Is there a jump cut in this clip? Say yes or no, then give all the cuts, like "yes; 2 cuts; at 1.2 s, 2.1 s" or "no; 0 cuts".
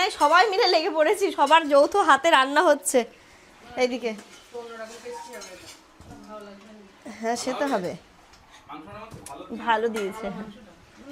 no; 0 cuts